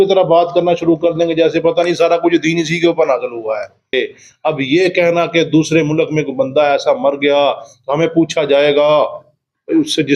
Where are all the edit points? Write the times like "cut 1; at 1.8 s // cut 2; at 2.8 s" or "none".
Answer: cut 1; at 3.9 s

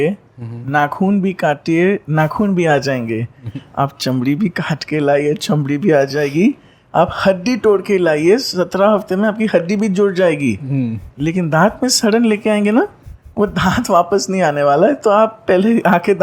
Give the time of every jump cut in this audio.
none

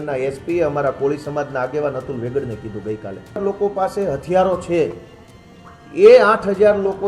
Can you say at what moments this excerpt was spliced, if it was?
cut 1; at 3.4 s

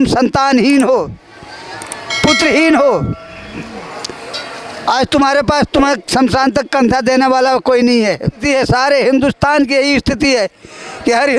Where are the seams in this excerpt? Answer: cut 1; at 8.4 s

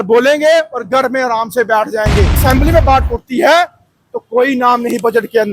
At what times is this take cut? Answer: cut 1; at 2.4 s

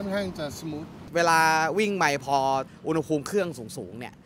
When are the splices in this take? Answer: cut 1; at 0.9 s // cut 2; at 2.7 s

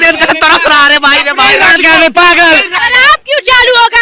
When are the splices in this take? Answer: cut 1; at 2.7 s

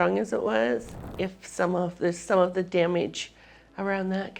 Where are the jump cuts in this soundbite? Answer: cut 1; at 1.0 s

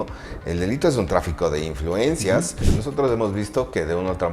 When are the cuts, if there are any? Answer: cut 1; at 2.7 s

